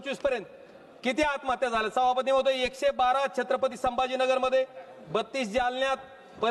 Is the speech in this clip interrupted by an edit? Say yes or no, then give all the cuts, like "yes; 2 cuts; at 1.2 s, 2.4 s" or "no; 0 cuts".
no; 0 cuts